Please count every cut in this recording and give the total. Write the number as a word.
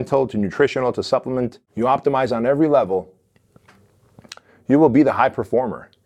one